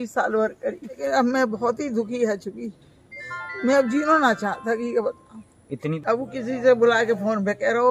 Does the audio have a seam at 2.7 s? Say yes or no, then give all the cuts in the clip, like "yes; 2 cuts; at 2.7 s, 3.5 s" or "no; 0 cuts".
no; 2 cuts; at 1.0 s, 6.0 s